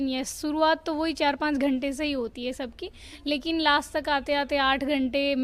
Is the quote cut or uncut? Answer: uncut